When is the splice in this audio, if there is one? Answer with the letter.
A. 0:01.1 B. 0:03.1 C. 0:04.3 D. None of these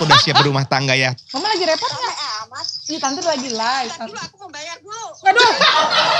A